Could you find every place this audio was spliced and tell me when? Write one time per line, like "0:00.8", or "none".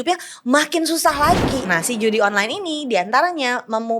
0:01.6